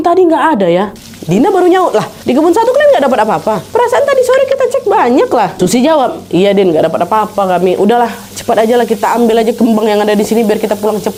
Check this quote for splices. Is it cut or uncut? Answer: uncut